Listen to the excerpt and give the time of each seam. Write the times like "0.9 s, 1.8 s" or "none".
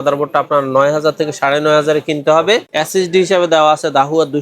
2.7 s